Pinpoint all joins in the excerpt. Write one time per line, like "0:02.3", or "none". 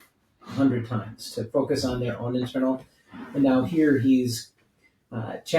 none